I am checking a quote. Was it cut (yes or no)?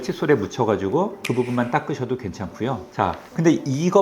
yes